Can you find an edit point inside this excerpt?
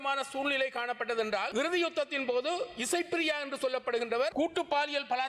yes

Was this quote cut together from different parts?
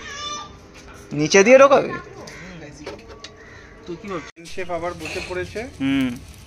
yes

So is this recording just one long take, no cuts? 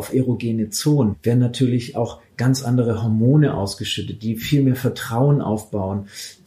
no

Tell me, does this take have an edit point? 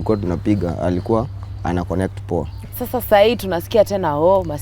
yes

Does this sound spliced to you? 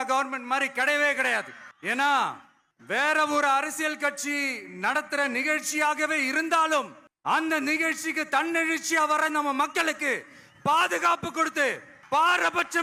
no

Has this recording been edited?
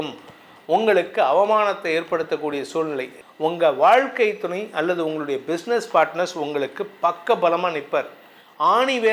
yes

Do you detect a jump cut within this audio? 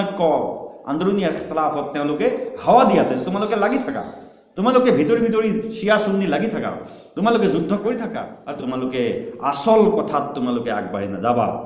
yes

